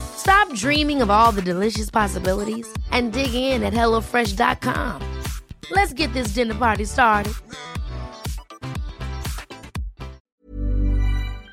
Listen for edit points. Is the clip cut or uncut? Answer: cut